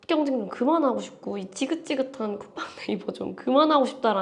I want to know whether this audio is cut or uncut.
uncut